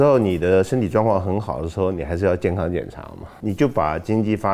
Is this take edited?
yes; 1 cut; at 3.3 s

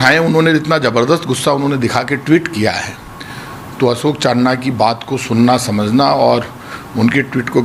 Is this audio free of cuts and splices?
yes; 0 cuts

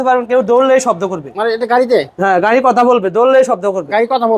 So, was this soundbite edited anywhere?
no; 0 cuts

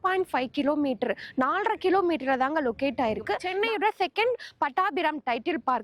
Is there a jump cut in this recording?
yes; 1 cut; at 3.4 s

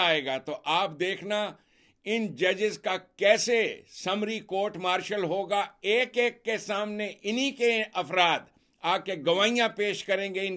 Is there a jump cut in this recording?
no; 0 cuts

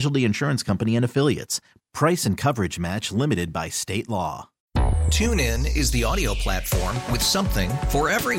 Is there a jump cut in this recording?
yes; 1 cut; at 4.5 s

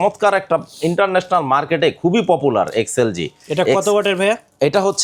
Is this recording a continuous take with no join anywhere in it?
yes; 0 cuts

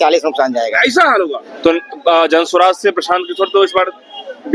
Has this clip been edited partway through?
yes; 1 cut; at 1.4 s

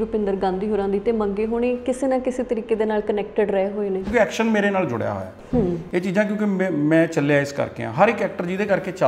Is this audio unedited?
no; 1 cut; at 4.1 s

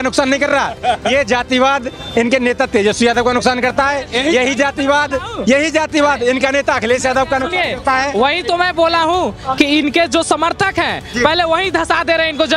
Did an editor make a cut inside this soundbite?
no; 0 cuts

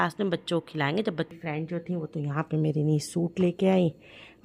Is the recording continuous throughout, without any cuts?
no; 1 cut; at 1.4 s

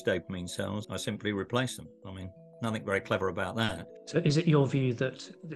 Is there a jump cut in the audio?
yes; 2 cuts; at 0.9 s, 4.0 s

